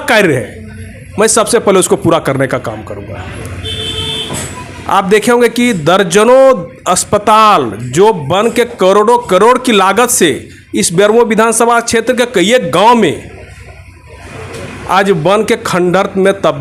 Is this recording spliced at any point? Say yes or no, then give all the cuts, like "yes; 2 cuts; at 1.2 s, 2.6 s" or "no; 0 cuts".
no; 0 cuts